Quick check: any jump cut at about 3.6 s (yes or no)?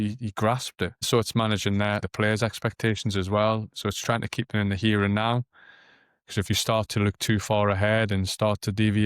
no